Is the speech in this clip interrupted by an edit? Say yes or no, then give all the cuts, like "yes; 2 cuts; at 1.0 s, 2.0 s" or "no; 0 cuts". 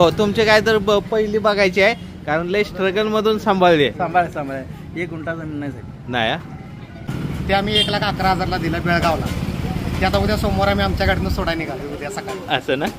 yes; 1 cut; at 7.1 s